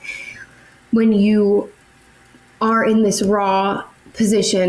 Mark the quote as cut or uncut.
uncut